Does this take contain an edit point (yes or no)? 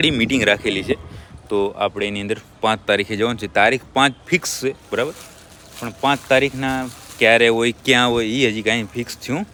no